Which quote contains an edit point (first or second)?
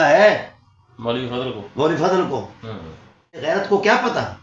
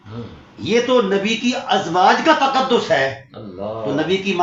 first